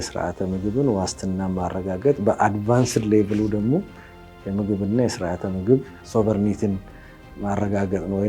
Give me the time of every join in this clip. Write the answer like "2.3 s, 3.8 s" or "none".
6.0 s